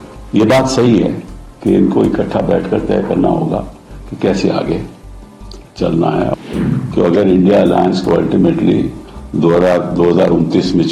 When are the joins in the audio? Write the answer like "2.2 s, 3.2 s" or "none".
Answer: 6.3 s